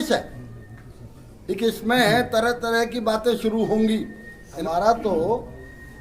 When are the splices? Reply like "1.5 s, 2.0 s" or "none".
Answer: 4.5 s

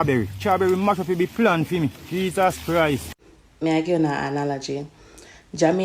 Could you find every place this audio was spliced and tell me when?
3.1 s

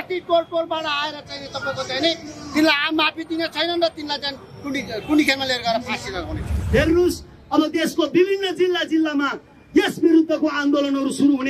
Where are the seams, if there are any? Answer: 6.5 s

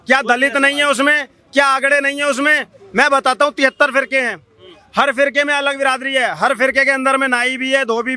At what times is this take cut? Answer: none

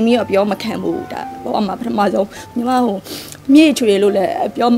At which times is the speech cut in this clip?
2.4 s

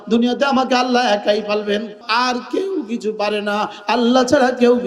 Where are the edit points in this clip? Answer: 2.0 s

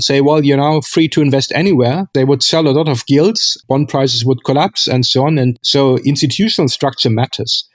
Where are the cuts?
2.1 s, 3.6 s, 5.6 s

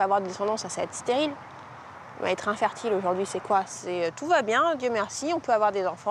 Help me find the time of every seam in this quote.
none

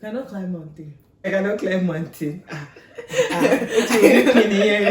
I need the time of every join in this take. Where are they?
1.3 s

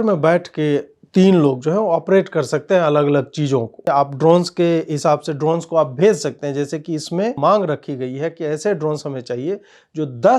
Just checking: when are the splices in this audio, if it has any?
3.9 s, 7.4 s

